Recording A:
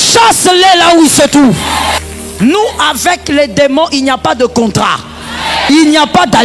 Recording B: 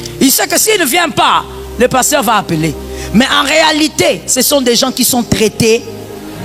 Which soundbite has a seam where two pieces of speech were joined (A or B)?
A